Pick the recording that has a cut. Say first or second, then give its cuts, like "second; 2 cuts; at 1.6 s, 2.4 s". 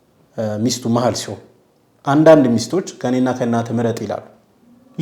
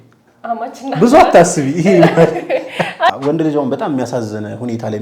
second; 1 cut; at 3.1 s